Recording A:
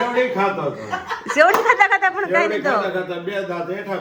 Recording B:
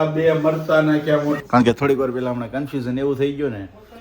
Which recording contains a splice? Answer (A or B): B